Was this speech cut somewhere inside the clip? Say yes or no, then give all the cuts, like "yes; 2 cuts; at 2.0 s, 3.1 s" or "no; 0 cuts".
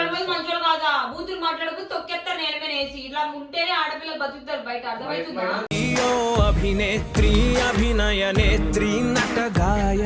no; 0 cuts